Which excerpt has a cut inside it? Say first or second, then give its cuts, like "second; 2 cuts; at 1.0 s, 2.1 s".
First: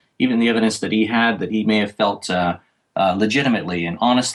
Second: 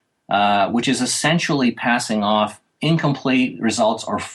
second; 1 cut; at 2.7 s